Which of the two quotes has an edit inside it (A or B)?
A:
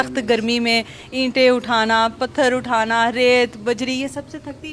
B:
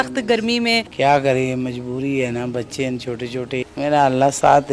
B